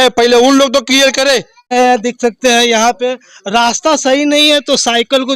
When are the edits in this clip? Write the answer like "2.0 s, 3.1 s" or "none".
1.7 s